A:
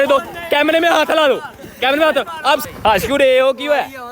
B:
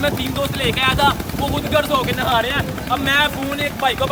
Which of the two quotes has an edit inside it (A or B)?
A